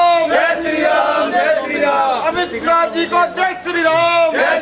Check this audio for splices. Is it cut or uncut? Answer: uncut